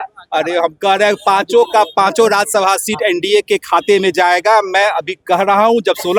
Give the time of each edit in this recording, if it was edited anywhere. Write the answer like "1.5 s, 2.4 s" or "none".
none